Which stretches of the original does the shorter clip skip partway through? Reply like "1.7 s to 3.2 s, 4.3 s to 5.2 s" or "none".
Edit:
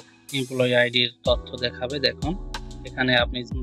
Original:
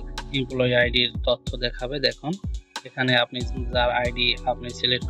none